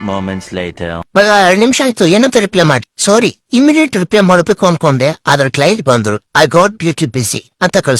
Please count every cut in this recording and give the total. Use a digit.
1